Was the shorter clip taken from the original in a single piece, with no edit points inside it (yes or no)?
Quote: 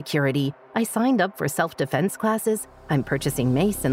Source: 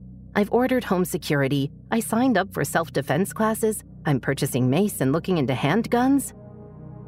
yes